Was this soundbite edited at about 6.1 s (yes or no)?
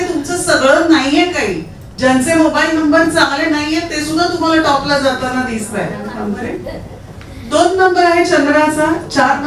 yes